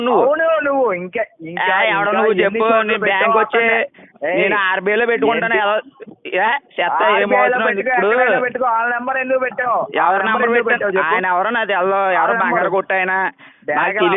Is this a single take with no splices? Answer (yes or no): yes